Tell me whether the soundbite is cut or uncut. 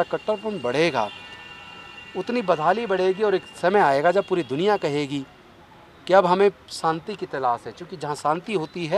uncut